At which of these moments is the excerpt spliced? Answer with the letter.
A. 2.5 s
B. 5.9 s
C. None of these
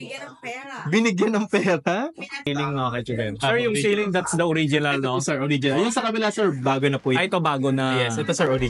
A